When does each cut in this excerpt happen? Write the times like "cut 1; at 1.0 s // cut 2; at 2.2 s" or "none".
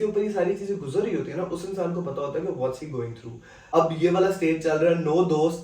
cut 1; at 3.6 s